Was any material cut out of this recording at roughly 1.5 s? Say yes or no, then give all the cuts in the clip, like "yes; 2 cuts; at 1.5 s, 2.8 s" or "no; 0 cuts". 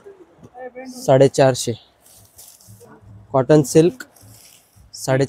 no; 1 cut; at 2.8 s